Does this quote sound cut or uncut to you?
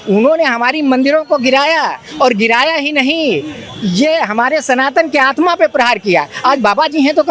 uncut